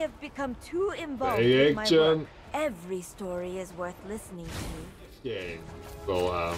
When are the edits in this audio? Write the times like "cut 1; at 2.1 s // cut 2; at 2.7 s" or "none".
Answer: cut 1; at 5.3 s